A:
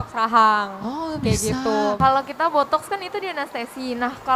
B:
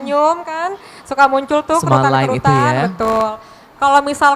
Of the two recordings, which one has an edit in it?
A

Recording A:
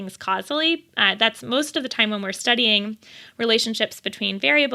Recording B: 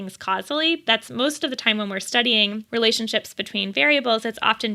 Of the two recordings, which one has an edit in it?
B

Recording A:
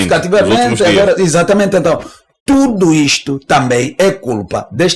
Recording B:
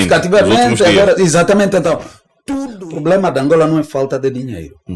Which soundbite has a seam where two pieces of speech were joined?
B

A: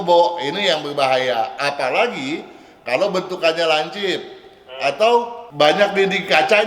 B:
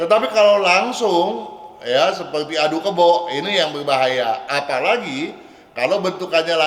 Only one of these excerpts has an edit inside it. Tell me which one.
A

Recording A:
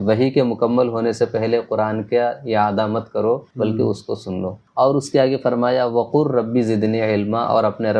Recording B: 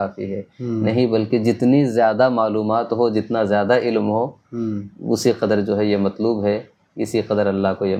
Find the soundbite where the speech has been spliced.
A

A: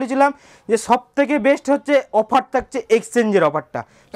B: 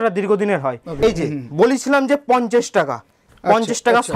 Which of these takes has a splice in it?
B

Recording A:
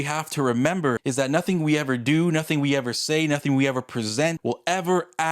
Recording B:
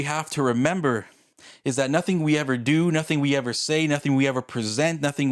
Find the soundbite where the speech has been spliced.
A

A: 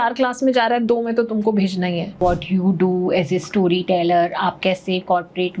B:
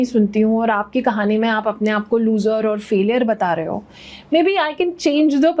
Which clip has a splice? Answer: A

